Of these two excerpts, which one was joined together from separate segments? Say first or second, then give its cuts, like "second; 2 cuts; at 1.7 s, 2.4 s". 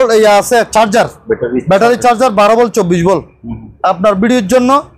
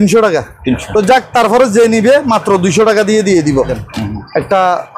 second; 2 cuts; at 0.8 s, 3.8 s